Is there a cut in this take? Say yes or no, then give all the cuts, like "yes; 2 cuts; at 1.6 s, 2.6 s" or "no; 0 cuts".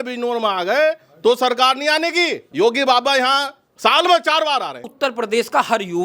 yes; 2 cuts; at 2.4 s, 4.9 s